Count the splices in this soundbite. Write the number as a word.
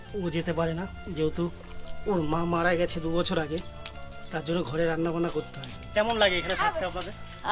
one